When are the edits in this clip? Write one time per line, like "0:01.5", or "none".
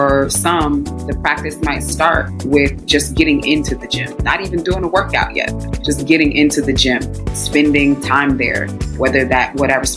0:01.0